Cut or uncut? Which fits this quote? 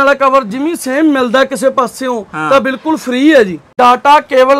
cut